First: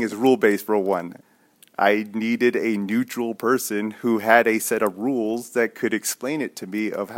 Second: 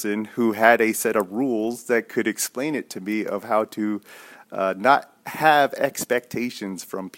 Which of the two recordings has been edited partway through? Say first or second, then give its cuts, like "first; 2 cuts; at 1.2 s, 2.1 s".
first; 1 cut; at 1.2 s